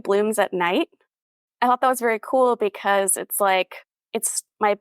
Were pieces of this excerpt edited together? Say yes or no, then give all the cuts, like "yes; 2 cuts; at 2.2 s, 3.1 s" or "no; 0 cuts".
yes; 1 cut; at 1.1 s